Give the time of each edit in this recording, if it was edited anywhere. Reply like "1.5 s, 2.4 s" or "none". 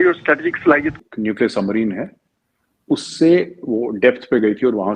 0.9 s

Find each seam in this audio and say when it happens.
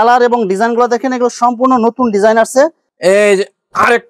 2.9 s

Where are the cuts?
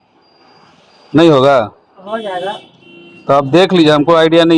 none

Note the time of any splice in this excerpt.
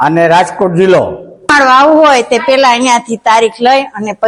1.1 s

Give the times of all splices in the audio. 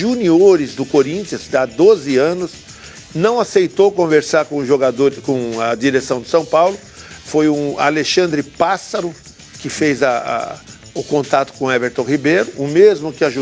7.0 s

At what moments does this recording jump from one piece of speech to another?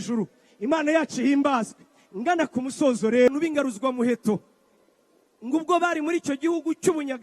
3.3 s

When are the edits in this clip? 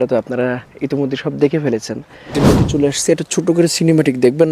2.3 s

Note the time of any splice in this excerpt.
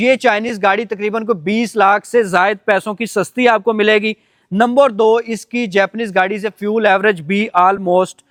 none

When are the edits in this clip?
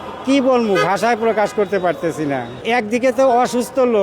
2.6 s

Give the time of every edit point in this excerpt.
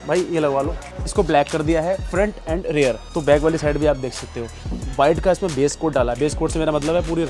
1.1 s, 3.0 s, 4.8 s

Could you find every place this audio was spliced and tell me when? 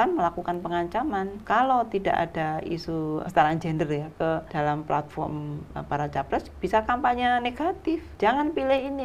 1.4 s, 3.2 s, 4.5 s, 8.1 s

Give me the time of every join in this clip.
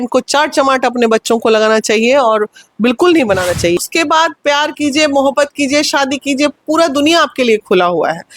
3.8 s

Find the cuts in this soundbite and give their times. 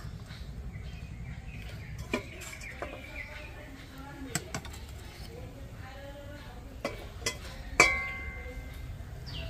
none

